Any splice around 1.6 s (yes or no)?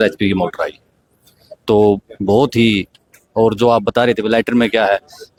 no